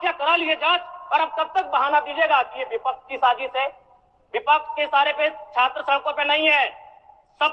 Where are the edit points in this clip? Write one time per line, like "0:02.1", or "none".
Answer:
none